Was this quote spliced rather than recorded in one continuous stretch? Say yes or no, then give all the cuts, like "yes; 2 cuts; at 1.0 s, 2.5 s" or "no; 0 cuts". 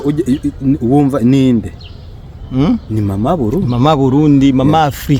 no; 0 cuts